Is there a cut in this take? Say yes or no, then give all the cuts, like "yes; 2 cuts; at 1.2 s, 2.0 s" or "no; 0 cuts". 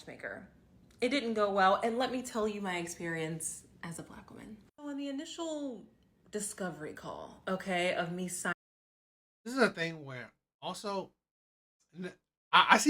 no; 0 cuts